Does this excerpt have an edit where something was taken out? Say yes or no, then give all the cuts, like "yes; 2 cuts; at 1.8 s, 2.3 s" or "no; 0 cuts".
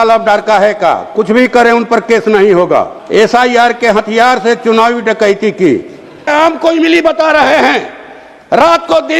yes; 2 cuts; at 3.0 s, 6.3 s